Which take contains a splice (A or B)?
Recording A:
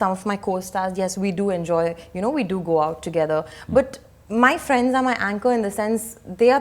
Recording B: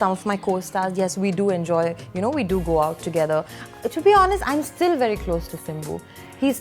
B